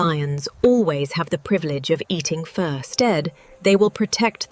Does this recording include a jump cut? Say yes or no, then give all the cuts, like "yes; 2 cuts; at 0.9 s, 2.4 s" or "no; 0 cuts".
yes; 1 cut; at 2.9 s